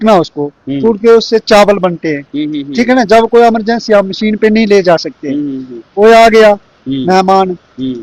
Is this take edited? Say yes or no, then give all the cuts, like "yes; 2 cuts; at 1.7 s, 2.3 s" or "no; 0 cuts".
no; 0 cuts